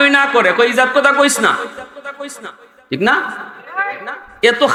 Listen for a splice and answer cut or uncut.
uncut